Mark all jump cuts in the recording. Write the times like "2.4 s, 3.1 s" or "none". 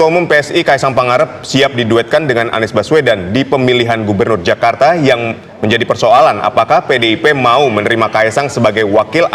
none